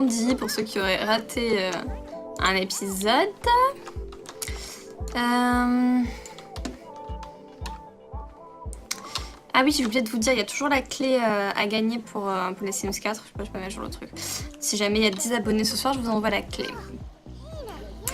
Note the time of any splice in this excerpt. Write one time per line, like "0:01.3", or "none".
0:09.7